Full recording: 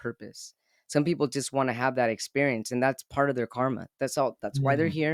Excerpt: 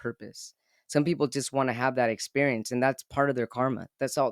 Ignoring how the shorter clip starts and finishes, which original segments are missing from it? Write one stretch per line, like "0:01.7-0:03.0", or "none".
none